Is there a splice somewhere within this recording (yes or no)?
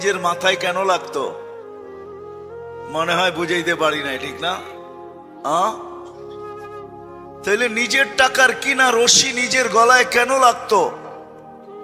no